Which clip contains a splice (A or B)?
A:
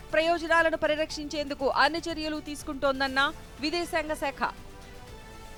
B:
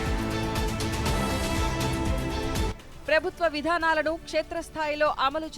B